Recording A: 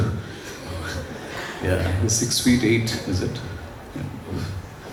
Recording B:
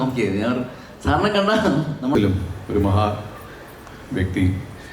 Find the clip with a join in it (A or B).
B